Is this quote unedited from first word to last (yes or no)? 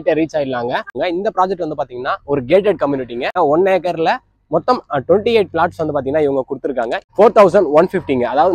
no